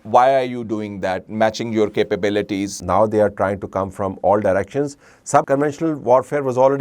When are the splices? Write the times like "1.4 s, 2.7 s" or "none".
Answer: 2.7 s, 5.5 s